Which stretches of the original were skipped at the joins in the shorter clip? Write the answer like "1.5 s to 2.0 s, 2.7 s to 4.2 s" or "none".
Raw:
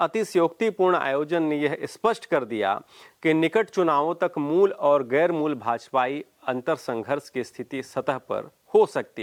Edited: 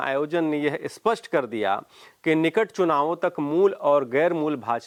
none